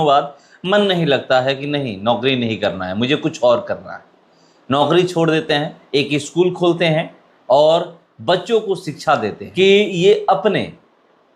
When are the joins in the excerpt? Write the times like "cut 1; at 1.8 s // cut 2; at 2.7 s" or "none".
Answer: cut 1; at 5.8 s // cut 2; at 9.4 s